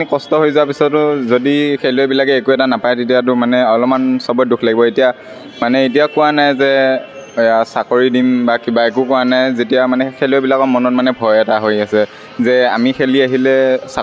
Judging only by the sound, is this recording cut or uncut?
uncut